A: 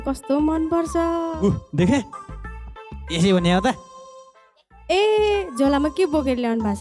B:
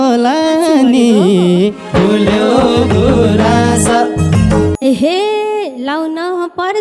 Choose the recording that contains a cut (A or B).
B